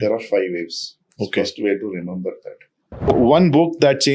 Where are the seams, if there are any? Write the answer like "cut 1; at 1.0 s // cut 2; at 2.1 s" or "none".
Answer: cut 1; at 3.1 s